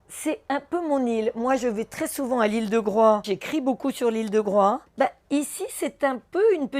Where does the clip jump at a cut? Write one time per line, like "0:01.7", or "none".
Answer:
0:03.3
0:04.9